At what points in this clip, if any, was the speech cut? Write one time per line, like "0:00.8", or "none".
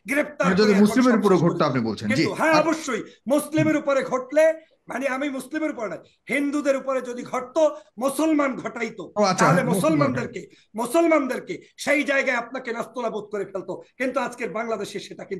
none